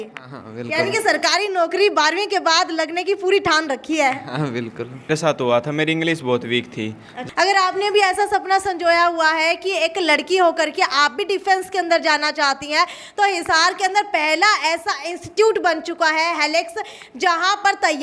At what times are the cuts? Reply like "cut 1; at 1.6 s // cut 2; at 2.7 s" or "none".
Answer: cut 1; at 5.1 s // cut 2; at 7.2 s